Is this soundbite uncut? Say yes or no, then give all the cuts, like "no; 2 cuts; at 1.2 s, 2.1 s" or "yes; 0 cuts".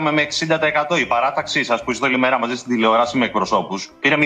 yes; 0 cuts